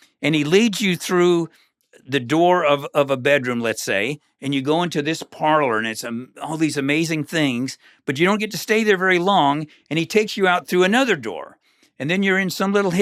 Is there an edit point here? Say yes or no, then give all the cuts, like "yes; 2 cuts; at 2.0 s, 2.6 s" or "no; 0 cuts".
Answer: no; 0 cuts